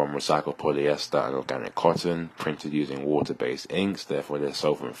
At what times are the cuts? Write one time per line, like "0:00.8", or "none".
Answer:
none

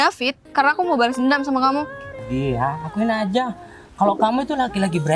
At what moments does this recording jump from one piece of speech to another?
0:02.2

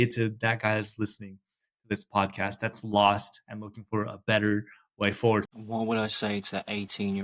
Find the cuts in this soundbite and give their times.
0:05.5

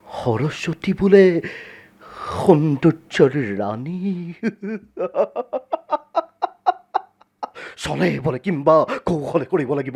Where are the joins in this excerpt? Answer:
none

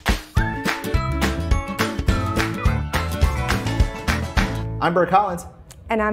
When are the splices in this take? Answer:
none

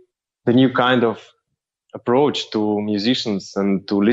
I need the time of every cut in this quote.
none

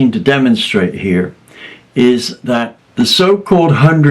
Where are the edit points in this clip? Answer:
0:02.8

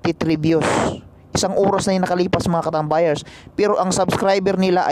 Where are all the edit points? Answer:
none

